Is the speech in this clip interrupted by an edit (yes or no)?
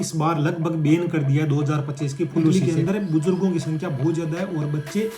yes